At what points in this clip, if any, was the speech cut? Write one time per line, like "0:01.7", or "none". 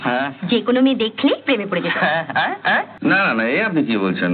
0:02.9